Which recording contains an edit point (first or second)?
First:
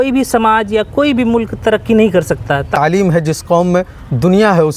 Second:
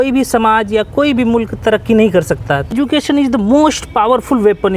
second